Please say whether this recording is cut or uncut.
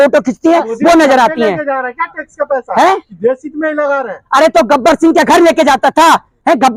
uncut